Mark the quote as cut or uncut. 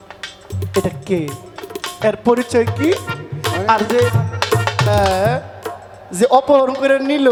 uncut